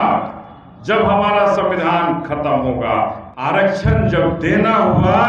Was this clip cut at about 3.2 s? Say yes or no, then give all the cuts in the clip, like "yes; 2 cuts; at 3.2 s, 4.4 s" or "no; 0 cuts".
yes; 1 cut; at 3.2 s